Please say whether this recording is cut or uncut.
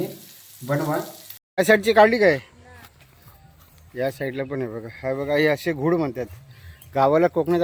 cut